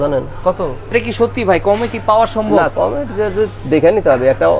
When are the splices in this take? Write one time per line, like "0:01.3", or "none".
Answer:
0:00.9